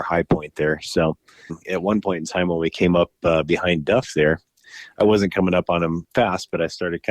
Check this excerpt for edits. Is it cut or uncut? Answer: cut